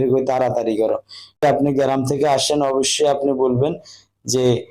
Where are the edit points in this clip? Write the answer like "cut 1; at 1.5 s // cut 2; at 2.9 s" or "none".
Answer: cut 1; at 1.4 s